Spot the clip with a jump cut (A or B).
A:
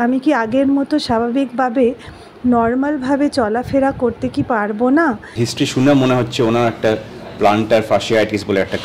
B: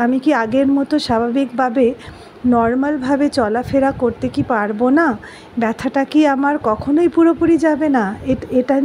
A